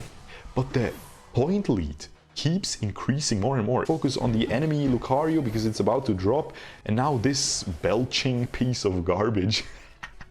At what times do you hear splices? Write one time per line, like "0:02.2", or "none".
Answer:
0:03.8